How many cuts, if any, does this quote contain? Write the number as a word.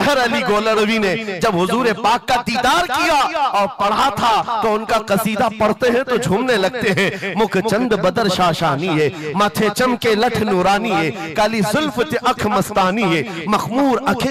zero